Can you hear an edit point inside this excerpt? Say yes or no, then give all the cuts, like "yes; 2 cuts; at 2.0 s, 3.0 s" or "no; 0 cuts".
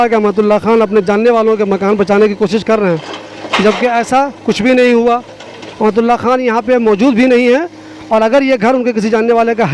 no; 0 cuts